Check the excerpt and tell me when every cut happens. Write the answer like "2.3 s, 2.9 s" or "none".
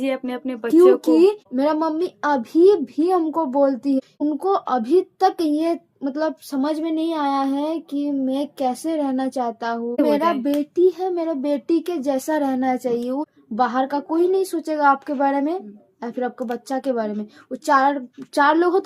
1.5 s, 4.1 s, 10.0 s, 13.3 s